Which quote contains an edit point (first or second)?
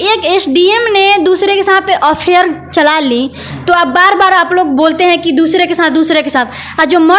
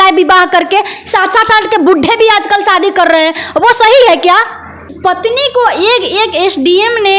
second